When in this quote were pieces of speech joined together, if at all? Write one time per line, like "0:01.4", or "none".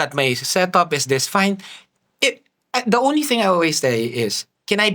none